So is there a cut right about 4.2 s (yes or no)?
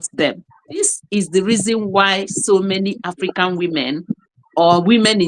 no